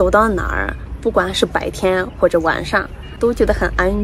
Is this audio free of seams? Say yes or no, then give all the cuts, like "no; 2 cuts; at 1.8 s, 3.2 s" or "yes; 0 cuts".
no; 1 cut; at 3.0 s